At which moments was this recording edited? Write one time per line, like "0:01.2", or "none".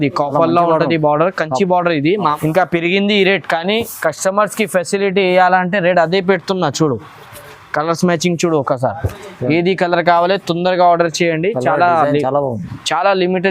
0:02.3